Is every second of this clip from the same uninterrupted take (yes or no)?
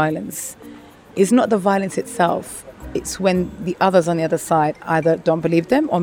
yes